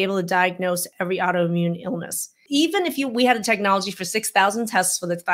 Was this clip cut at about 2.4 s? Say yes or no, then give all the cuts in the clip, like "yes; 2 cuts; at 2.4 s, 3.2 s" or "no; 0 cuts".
yes; 1 cut; at 2.4 s